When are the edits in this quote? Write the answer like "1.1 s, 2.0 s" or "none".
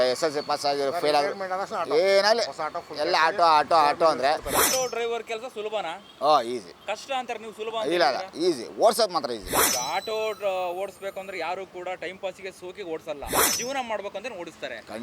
4.7 s, 6.0 s, 6.7 s, 9.7 s